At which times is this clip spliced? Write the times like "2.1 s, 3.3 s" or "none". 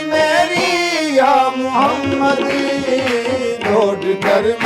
none